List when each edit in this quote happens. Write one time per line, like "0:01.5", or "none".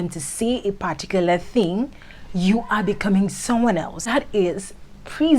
0:04.0